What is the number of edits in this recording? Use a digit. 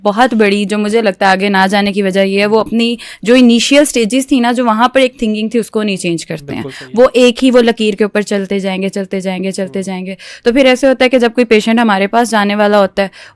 0